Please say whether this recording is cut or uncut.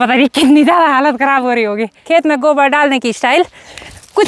cut